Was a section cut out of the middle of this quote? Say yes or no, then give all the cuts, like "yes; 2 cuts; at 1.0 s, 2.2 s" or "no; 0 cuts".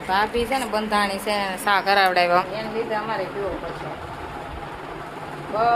yes; 1 cut; at 2.4 s